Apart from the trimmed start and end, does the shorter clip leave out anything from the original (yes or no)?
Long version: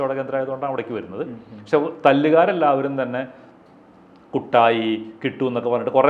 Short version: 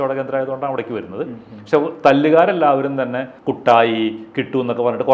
yes